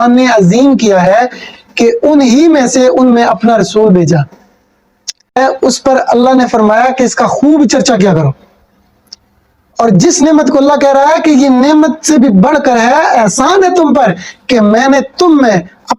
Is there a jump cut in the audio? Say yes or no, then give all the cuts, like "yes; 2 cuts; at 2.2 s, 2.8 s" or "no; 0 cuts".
yes; 1 cut; at 5.4 s